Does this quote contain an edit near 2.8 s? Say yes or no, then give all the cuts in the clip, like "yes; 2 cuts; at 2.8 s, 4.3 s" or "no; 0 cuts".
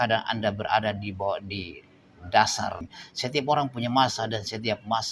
yes; 1 cut; at 2.8 s